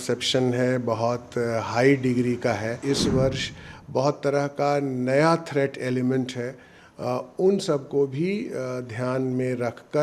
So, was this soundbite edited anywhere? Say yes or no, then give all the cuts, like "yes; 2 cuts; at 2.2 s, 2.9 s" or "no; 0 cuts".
yes; 1 cut; at 2.8 s